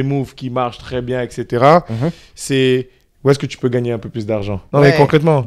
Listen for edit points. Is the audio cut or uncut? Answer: cut